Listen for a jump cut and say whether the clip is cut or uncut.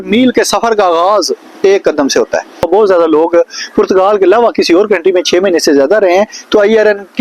cut